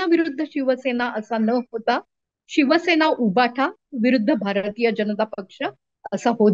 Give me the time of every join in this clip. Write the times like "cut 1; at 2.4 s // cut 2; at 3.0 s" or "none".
none

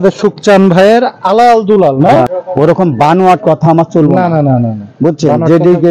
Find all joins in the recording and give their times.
cut 1; at 2.3 s

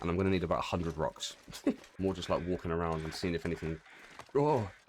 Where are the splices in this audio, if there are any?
cut 1; at 1.9 s

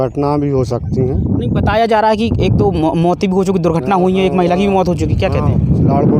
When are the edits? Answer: none

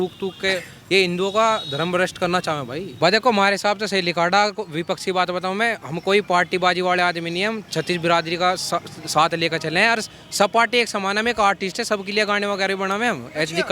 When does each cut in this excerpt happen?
cut 1; at 2.8 s

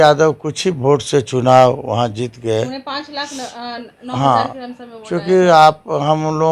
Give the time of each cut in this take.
none

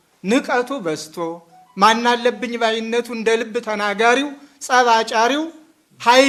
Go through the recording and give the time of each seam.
none

